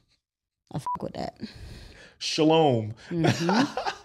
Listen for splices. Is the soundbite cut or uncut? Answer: uncut